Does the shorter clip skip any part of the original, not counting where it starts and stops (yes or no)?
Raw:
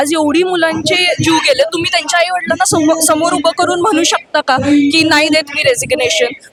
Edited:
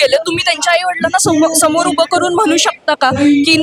no